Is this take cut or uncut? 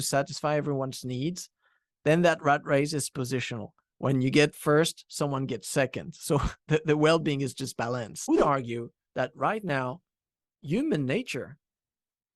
cut